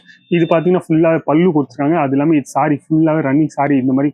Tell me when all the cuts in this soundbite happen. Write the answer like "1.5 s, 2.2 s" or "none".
none